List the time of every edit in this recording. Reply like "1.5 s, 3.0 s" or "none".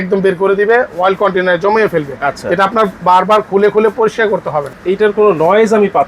4.7 s

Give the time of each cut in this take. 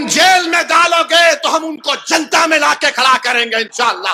none

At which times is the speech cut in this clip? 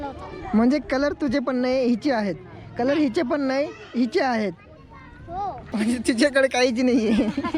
5.6 s

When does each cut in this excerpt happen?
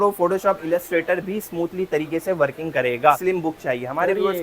3.2 s

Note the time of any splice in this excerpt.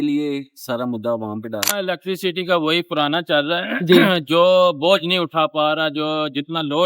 1.7 s

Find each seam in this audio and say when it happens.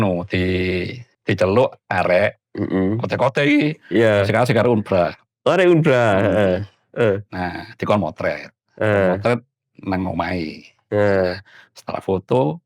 1.0 s

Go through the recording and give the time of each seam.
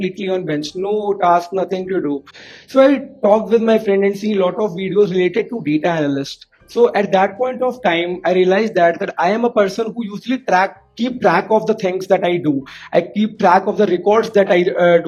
none

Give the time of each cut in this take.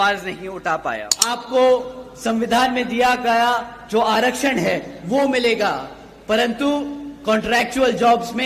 1.4 s

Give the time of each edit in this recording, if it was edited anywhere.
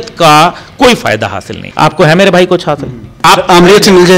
1.6 s, 3.2 s

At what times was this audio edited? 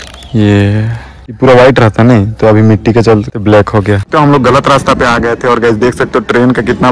1.4 s, 4.1 s

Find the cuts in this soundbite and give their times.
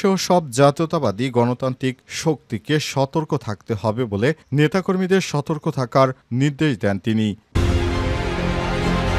7.6 s

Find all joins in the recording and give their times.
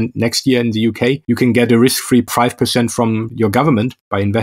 1.2 s, 2.3 s, 3.3 s

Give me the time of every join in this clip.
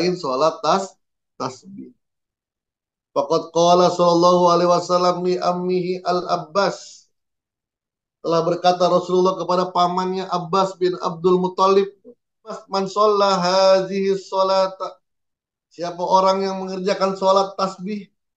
12.6 s

